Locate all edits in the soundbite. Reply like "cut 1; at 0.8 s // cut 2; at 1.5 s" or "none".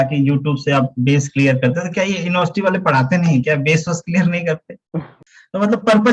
cut 1; at 5.2 s